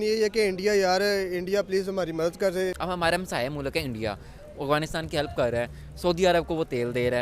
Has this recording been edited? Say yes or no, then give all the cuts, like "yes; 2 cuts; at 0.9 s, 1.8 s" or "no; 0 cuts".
yes; 1 cut; at 2.7 s